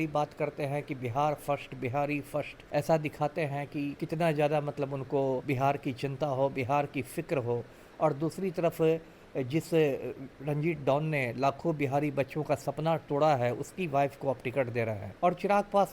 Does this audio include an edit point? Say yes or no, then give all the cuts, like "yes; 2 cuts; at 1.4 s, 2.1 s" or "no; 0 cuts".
yes; 4 cuts; at 2.6 s, 4.0 s, 5.4 s, 15.0 s